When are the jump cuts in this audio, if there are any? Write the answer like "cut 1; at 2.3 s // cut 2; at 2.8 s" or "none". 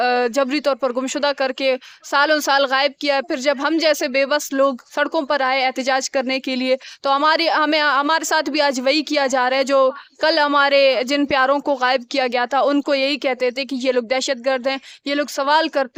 none